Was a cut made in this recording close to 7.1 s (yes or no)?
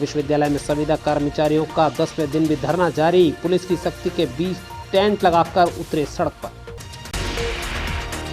yes